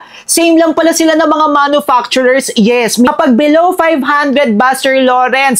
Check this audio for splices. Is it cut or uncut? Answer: cut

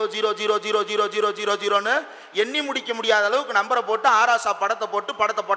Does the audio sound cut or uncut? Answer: uncut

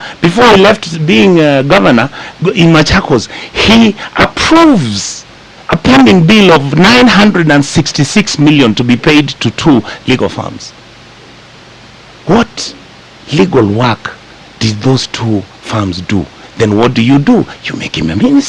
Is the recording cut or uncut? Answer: uncut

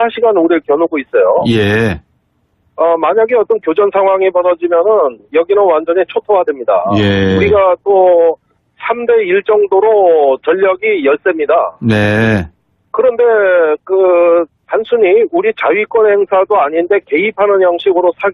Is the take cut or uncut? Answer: cut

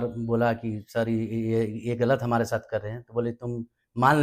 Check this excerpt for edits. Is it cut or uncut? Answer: uncut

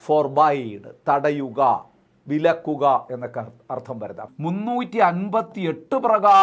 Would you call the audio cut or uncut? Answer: cut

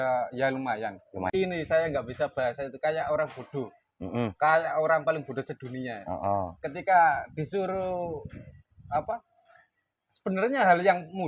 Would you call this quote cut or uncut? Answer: cut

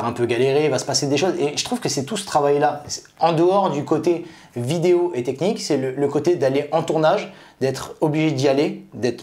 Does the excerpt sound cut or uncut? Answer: uncut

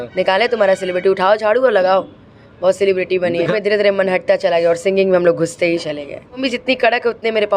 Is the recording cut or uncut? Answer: cut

